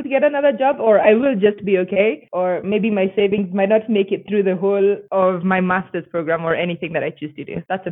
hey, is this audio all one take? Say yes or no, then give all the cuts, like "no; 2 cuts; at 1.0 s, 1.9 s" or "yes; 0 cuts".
yes; 0 cuts